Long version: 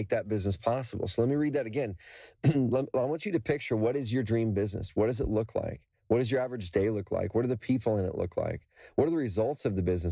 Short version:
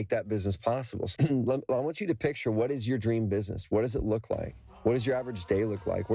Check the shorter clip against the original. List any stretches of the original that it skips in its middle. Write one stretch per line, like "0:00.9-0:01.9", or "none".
0:01.0-0:02.2